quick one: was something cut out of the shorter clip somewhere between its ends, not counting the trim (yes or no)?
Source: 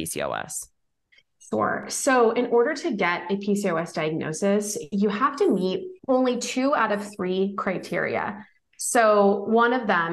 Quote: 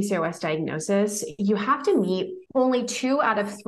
no